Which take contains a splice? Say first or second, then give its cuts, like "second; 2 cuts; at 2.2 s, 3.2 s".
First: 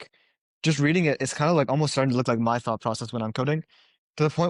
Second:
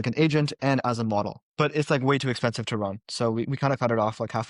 second; 1 cut; at 1.4 s